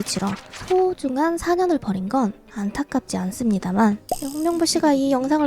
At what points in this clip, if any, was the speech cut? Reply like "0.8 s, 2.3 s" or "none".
4.1 s

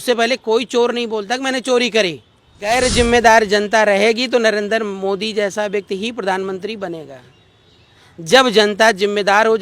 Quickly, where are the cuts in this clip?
2.7 s

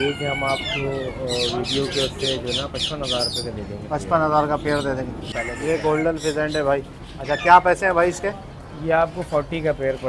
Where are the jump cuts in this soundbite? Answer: 5.3 s

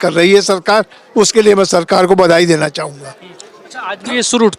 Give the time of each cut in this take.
none

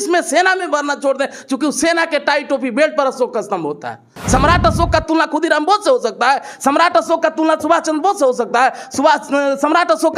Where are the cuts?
4.1 s

